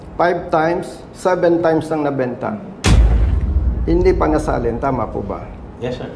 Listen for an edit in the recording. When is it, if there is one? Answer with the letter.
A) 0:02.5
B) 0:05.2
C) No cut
C